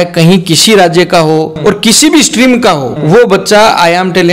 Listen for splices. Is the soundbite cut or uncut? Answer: cut